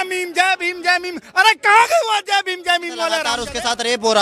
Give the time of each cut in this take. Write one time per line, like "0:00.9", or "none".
0:03.3